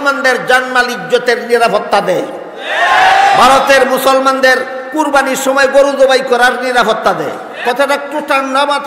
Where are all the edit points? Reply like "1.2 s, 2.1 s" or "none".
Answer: 7.5 s